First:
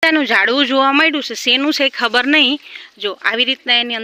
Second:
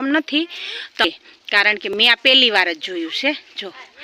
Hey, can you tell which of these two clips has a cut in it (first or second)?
second